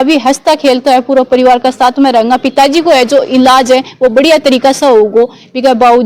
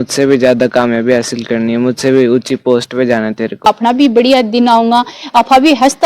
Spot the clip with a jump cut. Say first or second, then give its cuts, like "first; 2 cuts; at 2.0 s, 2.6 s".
second; 1 cut; at 3.7 s